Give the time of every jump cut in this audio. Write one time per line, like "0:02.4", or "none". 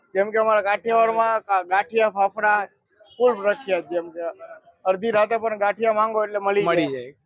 none